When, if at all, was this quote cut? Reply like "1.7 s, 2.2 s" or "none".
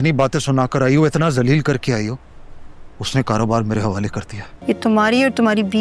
4.6 s

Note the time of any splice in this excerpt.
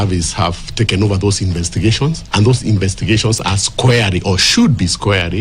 none

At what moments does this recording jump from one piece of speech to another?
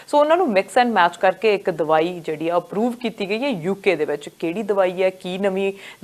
none

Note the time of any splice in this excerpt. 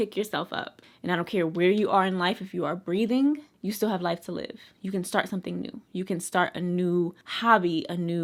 none

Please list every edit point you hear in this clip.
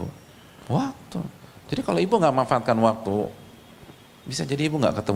none

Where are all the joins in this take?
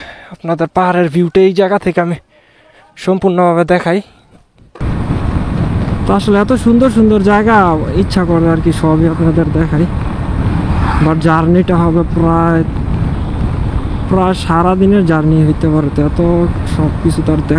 4.8 s

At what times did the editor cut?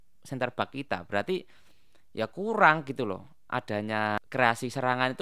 4.1 s

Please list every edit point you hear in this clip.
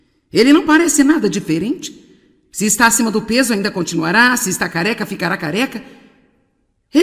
1.6 s

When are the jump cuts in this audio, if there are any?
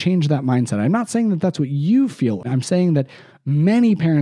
2.4 s

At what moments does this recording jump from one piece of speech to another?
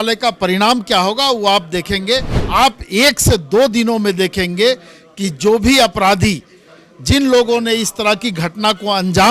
2.3 s

